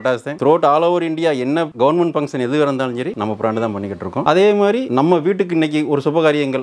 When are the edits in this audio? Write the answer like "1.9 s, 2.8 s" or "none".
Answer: none